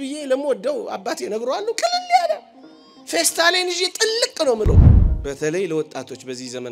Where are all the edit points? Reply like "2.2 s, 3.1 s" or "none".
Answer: 4.9 s